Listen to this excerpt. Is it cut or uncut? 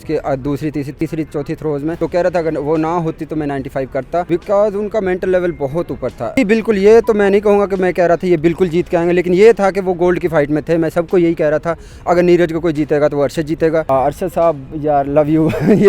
cut